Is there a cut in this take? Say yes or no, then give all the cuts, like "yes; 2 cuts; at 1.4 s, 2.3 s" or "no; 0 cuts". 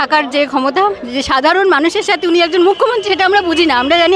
no; 0 cuts